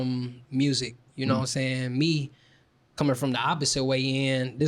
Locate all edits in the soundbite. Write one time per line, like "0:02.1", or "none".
none